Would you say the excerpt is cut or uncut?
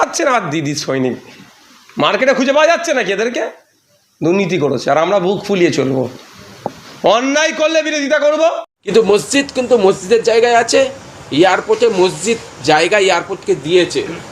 cut